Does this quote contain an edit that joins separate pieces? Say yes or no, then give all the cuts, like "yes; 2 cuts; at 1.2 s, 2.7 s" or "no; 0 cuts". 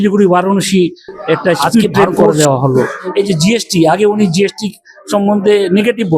yes; 1 cut; at 3.0 s